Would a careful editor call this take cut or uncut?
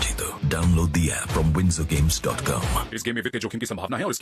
uncut